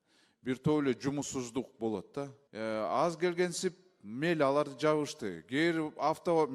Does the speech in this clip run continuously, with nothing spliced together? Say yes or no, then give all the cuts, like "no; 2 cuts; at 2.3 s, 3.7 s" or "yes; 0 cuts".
no; 1 cut; at 2.4 s